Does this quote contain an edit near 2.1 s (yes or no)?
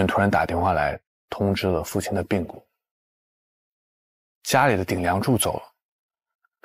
no